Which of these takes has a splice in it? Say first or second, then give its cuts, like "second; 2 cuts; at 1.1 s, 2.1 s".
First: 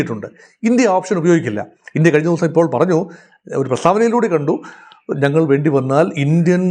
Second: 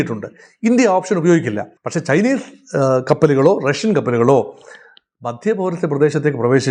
second; 1 cut; at 1.8 s